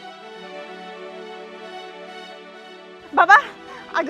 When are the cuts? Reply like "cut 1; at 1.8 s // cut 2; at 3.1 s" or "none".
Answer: cut 1; at 3.1 s